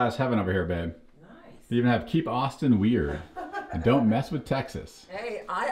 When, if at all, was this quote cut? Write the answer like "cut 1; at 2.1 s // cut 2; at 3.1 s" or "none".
none